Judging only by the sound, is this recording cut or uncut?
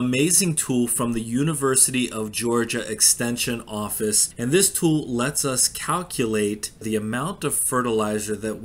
cut